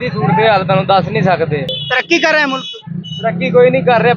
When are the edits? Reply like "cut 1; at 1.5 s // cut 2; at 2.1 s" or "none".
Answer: cut 1; at 1.8 s